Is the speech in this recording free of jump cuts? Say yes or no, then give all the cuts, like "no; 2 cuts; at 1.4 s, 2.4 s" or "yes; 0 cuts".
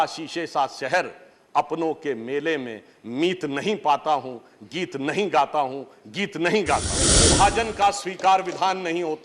no; 1 cut; at 7.1 s